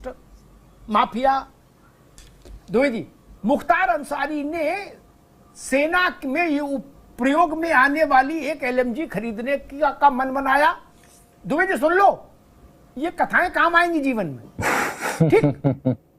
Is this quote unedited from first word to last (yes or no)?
no